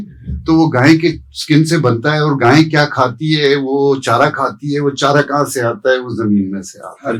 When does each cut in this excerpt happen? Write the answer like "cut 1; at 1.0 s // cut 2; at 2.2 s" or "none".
none